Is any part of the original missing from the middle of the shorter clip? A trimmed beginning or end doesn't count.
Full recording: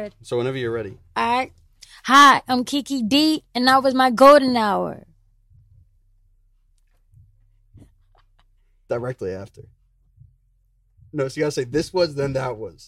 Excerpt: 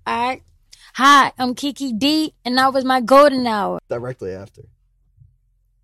yes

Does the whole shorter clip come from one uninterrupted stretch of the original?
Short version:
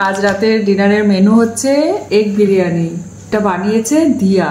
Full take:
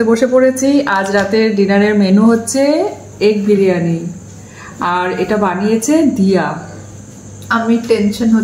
no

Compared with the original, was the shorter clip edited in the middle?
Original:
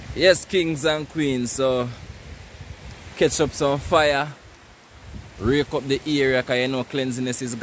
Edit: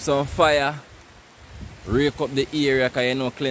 no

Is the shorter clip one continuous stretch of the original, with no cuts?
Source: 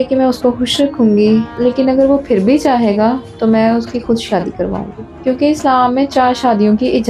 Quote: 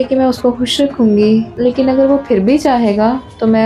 yes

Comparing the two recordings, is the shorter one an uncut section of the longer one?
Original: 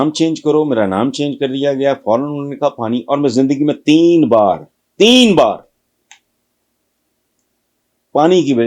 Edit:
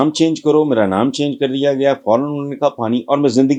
yes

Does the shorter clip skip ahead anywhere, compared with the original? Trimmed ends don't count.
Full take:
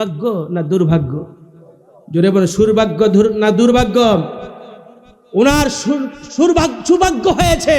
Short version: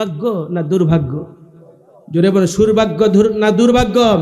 no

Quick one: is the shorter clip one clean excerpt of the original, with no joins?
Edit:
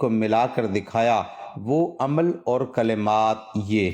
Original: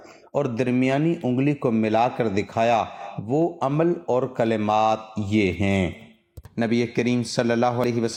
yes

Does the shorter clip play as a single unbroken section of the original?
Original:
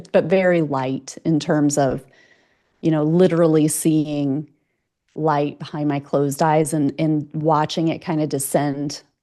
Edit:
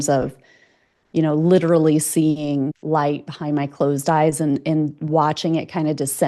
no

